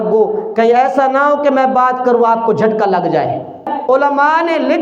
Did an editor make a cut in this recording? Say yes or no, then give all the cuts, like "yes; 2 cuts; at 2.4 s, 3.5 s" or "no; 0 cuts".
yes; 1 cut; at 3.7 s